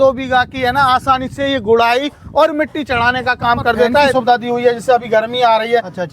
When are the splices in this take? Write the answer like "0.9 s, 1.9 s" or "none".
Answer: 4.1 s